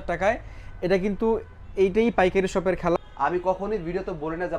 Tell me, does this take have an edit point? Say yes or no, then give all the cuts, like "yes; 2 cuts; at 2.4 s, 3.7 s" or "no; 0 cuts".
yes; 1 cut; at 3.0 s